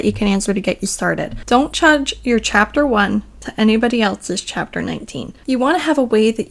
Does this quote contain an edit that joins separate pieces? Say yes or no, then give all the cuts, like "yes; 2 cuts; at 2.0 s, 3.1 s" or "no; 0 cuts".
yes; 2 cuts; at 1.3 s, 5.4 s